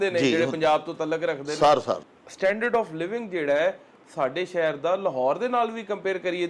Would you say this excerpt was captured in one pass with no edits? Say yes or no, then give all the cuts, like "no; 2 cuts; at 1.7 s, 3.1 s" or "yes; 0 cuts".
no; 1 cut; at 2.1 s